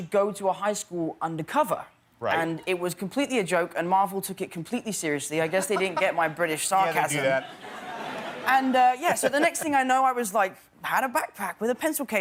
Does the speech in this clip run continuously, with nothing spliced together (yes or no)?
yes